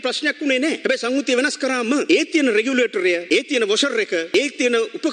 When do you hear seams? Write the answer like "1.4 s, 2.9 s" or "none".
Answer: 0.8 s, 2.0 s, 3.2 s, 4.3 s